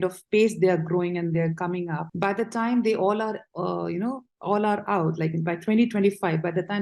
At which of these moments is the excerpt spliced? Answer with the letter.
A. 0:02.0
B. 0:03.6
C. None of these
A